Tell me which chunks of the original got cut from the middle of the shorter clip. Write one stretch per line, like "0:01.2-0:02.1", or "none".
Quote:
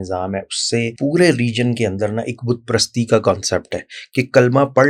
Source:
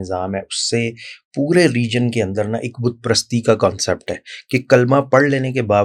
0:00.9-0:01.3